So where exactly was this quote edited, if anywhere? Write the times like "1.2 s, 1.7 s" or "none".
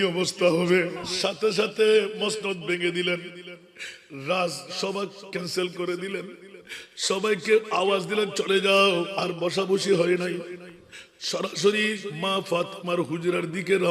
1.1 s, 9.1 s, 12.1 s